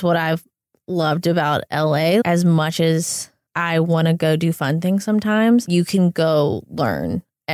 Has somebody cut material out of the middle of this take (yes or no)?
yes